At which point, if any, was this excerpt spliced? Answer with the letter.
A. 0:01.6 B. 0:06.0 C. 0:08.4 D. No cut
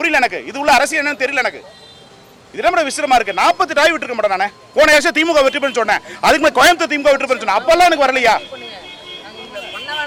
D